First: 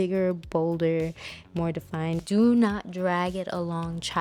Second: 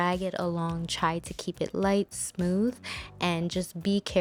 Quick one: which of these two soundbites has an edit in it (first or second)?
first